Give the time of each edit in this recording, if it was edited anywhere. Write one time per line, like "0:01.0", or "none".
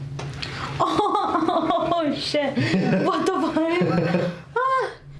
none